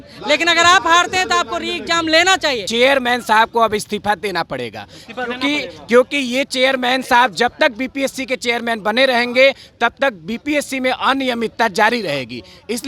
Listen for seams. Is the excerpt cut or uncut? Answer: cut